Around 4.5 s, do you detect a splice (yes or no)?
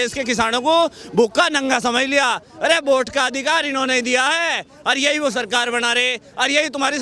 no